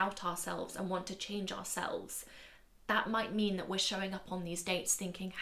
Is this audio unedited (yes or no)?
yes